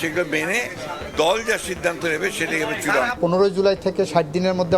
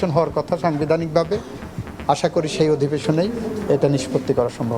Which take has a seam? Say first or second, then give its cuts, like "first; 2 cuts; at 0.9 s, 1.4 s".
first; 1 cut; at 3.2 s